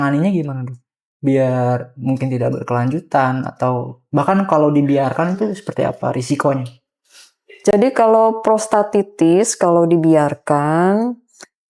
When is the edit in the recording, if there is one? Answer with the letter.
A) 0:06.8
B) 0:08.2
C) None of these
C